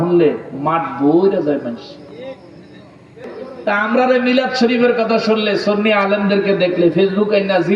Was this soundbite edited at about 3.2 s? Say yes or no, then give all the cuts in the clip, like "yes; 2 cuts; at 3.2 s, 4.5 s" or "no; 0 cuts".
yes; 1 cut; at 3.2 s